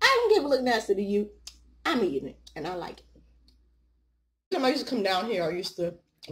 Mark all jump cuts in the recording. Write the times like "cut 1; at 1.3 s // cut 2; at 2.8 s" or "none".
cut 1; at 4.5 s

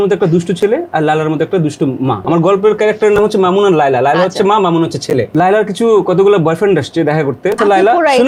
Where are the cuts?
cut 1; at 2.2 s // cut 2; at 5.3 s // cut 3; at 7.6 s

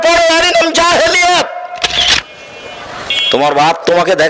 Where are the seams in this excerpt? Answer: cut 1; at 2.1 s

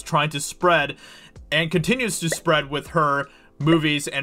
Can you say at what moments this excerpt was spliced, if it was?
none

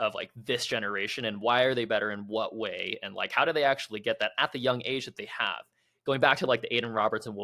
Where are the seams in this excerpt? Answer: none

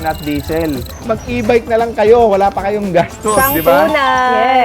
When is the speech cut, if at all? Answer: cut 1; at 0.9 s

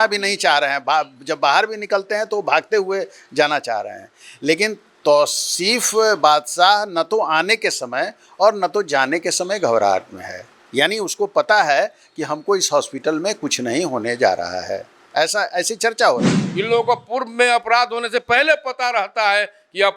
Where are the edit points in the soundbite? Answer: cut 1; at 16.4 s

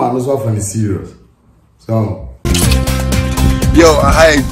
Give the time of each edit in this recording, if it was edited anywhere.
cut 1; at 2.4 s

